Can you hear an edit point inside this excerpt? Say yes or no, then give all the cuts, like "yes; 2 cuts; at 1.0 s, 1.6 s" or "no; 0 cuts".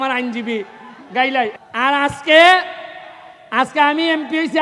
yes; 1 cut; at 1.5 s